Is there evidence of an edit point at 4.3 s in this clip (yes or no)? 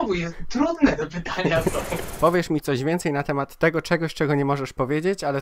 no